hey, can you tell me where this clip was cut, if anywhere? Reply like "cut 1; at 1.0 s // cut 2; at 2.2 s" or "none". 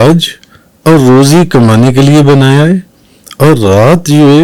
none

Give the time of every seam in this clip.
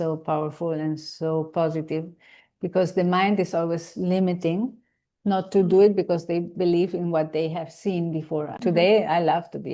cut 1; at 8.6 s

